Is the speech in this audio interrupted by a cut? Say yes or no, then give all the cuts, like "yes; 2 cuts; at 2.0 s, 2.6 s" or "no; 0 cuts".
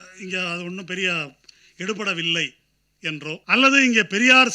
yes; 1 cut; at 3.4 s